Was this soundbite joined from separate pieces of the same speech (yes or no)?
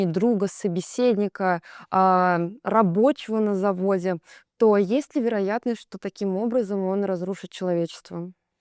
no